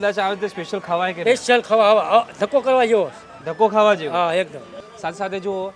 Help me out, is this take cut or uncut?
cut